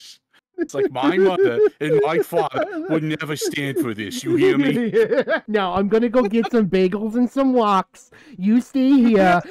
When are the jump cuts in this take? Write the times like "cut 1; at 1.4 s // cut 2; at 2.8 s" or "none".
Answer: cut 1; at 5.4 s